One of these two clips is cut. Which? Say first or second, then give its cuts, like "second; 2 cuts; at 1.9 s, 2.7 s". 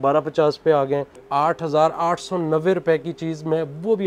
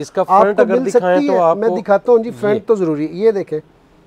first; 1 cut; at 1.2 s